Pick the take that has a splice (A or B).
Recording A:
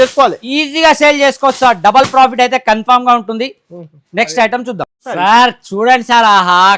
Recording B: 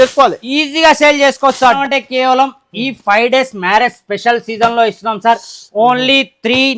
B